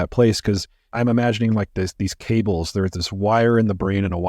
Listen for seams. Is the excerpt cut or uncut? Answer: cut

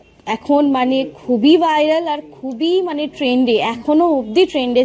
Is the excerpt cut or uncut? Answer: uncut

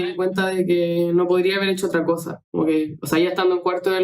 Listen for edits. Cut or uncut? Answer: uncut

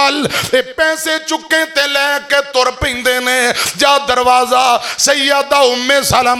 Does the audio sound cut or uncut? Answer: uncut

